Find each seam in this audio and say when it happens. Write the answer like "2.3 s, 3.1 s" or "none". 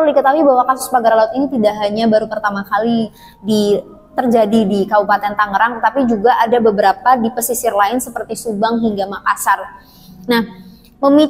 none